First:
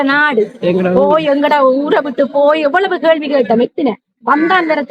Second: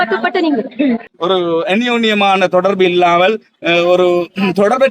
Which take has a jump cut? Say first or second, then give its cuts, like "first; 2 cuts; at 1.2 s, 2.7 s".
second; 1 cut; at 1.1 s